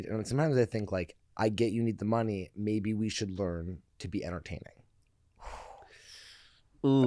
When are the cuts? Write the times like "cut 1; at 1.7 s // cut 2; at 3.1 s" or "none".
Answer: none